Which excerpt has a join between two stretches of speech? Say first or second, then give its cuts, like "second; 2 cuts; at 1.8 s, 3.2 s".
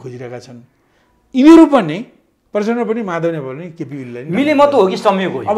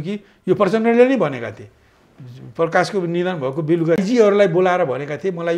second; 1 cut; at 4.0 s